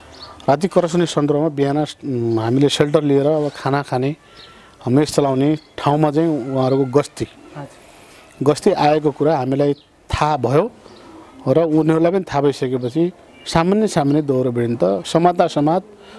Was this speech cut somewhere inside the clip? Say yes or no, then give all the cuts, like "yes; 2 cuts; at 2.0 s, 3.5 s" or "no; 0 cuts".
no; 0 cuts